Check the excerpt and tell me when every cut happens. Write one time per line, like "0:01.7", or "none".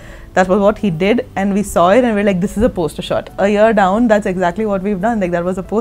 0:03.3